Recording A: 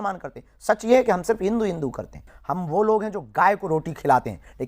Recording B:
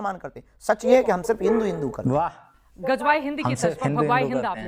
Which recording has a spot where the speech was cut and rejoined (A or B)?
A